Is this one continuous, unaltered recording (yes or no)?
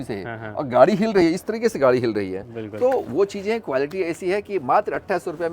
yes